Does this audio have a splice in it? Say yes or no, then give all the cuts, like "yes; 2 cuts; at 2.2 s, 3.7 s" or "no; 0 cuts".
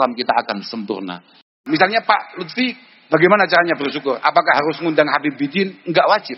yes; 1 cut; at 1.5 s